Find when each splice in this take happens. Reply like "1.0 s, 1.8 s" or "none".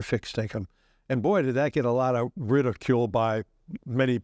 none